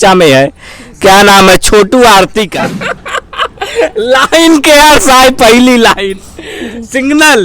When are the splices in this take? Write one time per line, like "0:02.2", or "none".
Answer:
0:02.5